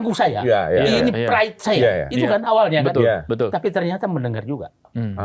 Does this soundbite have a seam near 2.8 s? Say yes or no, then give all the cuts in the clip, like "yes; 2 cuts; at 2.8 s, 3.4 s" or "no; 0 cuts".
no; 0 cuts